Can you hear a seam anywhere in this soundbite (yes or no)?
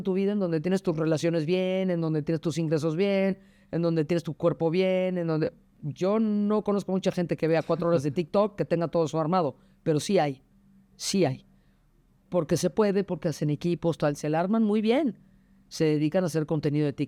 no